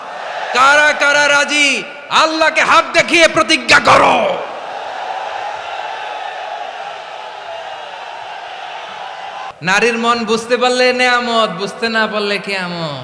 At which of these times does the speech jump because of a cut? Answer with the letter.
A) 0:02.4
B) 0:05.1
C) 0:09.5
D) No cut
C